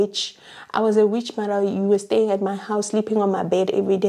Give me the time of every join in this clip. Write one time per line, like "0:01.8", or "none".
none